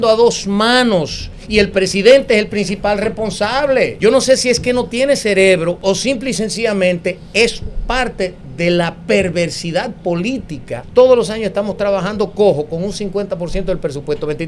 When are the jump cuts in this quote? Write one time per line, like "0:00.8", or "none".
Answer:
0:03.9
0:05.8
0:10.8